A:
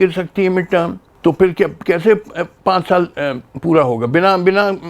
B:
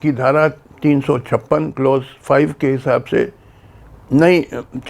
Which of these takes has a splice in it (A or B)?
A